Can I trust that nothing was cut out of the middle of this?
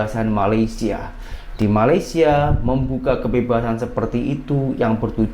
yes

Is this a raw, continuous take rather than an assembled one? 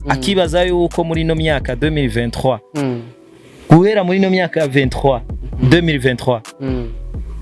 yes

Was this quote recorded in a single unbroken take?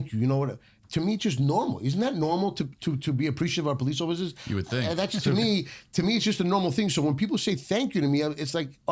yes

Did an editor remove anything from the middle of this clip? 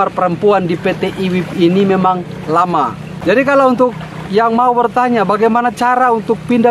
yes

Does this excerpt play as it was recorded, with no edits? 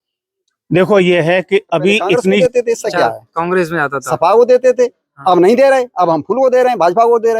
no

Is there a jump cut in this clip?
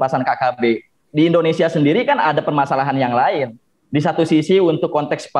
yes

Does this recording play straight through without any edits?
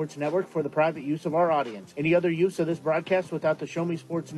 yes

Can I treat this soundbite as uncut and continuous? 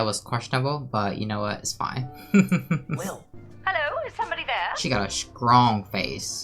no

